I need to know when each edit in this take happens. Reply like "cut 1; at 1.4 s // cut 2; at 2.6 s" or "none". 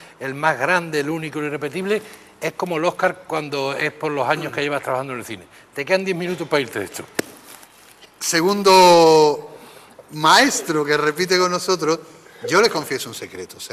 none